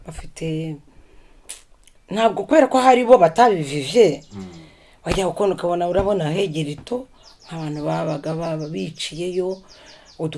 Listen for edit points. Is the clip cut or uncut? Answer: uncut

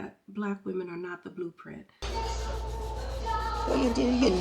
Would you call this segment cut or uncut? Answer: cut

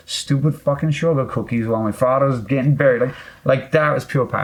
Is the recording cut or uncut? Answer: uncut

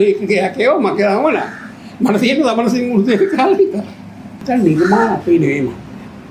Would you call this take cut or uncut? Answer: cut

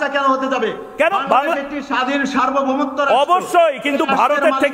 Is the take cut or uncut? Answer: uncut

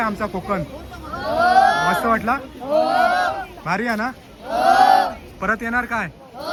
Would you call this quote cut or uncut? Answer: uncut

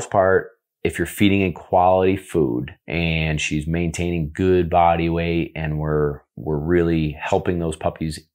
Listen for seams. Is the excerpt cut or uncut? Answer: cut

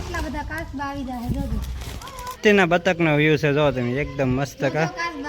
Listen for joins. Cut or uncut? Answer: cut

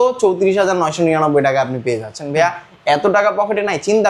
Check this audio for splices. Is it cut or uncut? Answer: uncut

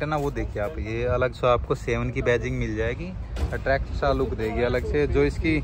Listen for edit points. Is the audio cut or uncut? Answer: uncut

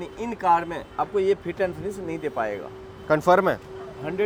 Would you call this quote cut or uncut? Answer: uncut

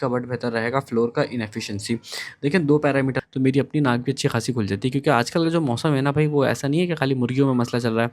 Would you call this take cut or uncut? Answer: cut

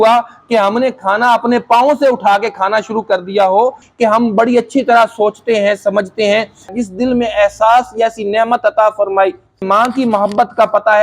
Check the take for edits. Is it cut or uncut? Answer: cut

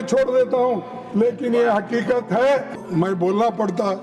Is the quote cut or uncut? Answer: cut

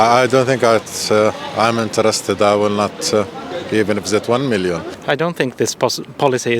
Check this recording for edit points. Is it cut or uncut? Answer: cut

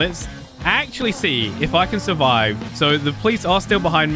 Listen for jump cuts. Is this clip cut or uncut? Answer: cut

